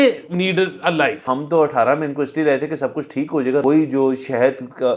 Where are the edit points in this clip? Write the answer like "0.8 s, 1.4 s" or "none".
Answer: 1.3 s, 3.6 s